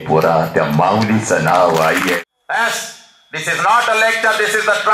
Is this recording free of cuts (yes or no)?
no